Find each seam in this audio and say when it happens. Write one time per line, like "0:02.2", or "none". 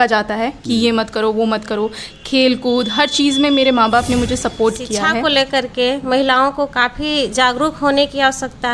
0:05.2